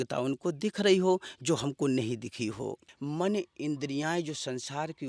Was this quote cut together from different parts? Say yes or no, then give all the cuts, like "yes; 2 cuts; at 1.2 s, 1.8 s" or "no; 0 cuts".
yes; 1 cut; at 2.9 s